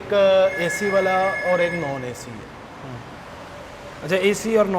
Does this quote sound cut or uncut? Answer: uncut